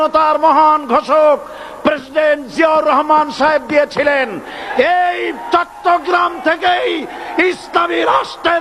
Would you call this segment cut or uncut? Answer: uncut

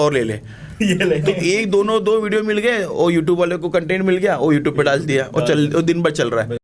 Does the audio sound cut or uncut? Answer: uncut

